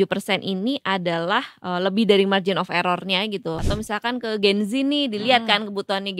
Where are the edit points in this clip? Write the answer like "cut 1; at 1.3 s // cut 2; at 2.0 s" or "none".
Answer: cut 1; at 3.6 s